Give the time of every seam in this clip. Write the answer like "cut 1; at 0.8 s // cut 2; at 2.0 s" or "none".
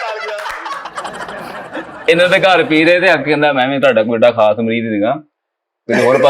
cut 1; at 2.0 s